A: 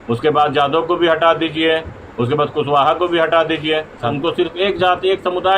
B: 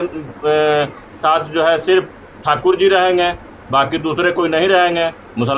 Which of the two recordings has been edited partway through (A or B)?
A